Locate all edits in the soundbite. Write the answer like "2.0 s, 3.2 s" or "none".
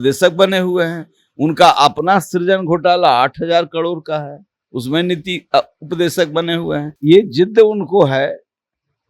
6.9 s